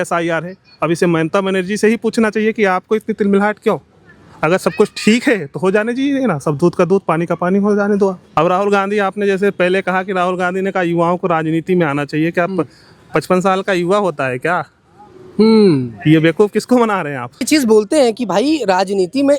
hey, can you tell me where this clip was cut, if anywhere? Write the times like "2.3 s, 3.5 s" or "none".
8.2 s, 17.4 s